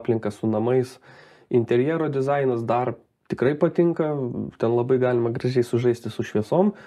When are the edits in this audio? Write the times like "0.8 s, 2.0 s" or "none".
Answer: none